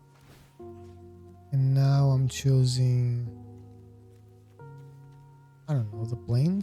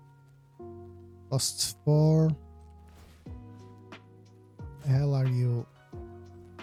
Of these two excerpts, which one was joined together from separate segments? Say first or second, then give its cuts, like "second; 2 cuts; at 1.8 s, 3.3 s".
first; 3 cuts; at 1.3 s, 4.0 s, 5.6 s